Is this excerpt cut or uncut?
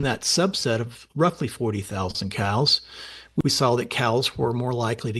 cut